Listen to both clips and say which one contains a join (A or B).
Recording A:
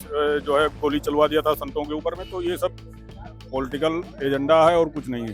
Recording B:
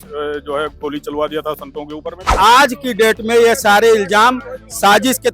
B